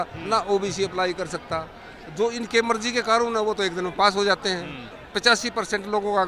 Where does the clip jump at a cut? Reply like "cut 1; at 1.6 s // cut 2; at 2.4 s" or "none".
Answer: cut 1; at 5.0 s